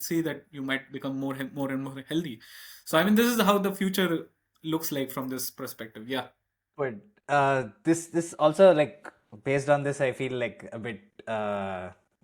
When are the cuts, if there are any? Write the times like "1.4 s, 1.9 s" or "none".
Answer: none